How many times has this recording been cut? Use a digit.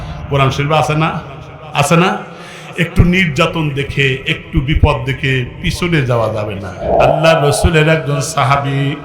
1